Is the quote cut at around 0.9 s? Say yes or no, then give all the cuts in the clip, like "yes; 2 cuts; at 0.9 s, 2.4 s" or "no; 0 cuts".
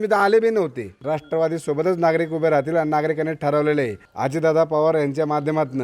yes; 2 cuts; at 0.9 s, 4.0 s